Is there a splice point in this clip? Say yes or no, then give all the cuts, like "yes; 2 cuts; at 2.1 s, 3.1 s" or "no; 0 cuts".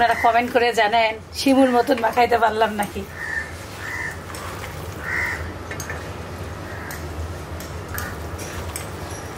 no; 0 cuts